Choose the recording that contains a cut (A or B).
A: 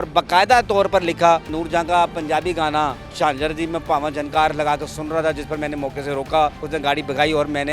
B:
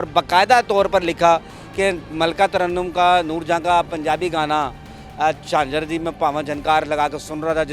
A